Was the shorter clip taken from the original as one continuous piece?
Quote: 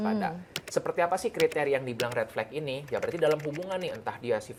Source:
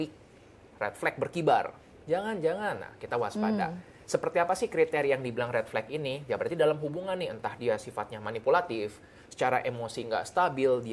yes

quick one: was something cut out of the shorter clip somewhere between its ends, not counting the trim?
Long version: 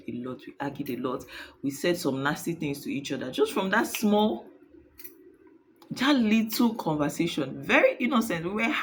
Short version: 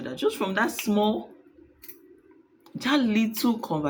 no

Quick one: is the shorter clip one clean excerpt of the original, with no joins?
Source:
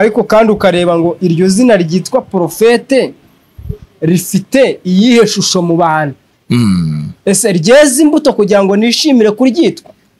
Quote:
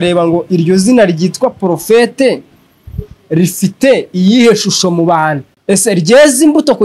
no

